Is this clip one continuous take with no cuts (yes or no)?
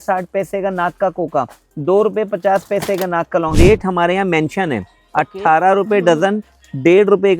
no